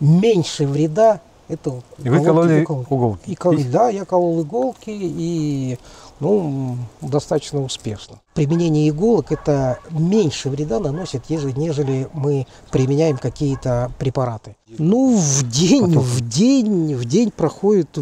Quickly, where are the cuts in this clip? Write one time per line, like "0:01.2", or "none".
0:08.1
0:14.8